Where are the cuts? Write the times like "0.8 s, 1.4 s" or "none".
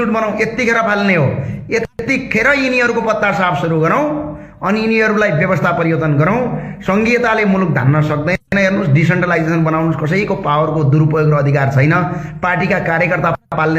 none